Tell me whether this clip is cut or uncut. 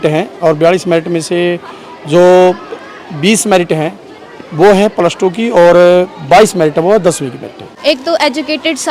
cut